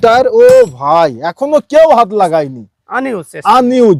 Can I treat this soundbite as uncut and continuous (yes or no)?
yes